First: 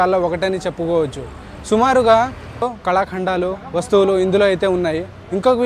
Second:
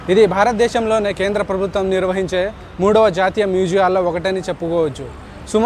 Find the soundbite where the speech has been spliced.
first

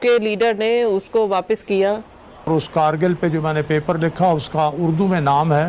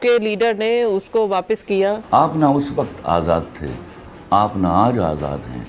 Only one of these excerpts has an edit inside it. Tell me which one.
second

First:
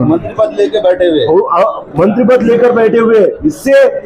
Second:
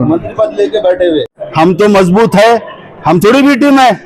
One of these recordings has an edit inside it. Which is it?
second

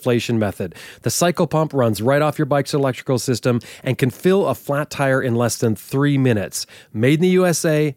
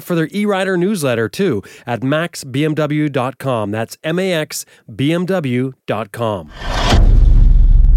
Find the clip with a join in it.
second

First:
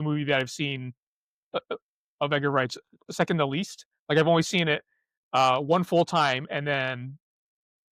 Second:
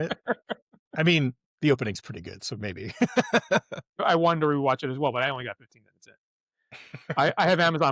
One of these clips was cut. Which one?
second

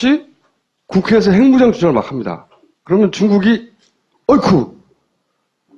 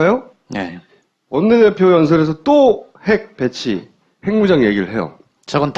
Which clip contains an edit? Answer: first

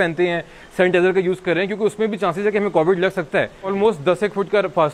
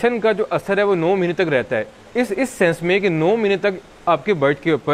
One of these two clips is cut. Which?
first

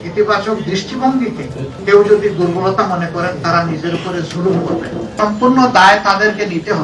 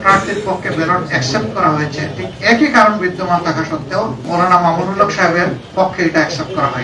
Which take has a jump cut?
first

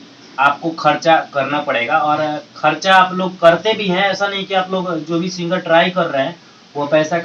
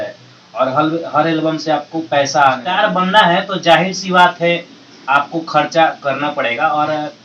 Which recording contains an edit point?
second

